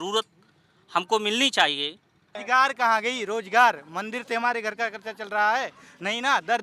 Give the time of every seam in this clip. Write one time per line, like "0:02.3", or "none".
0:02.3